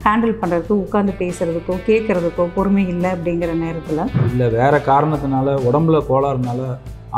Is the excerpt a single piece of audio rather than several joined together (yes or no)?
no